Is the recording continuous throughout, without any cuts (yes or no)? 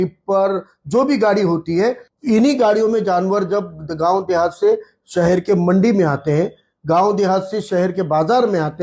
no